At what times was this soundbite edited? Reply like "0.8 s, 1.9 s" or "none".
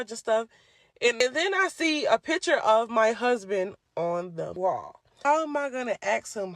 1.2 s, 5.0 s